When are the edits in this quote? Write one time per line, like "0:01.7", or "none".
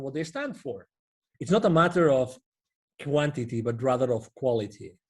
0:01.2